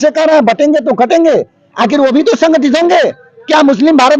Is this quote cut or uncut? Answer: uncut